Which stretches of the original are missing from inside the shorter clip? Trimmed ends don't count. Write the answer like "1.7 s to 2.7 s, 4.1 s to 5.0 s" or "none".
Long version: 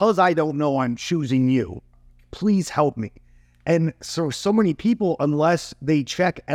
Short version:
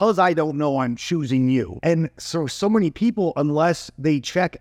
1.7 s to 3.6 s